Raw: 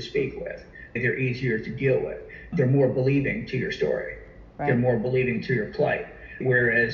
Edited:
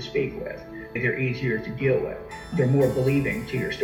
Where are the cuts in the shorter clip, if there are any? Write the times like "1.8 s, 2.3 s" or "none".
none